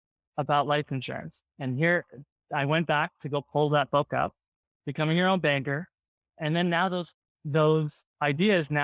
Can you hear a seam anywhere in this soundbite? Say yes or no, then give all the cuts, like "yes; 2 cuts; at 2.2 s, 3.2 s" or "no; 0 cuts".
no; 0 cuts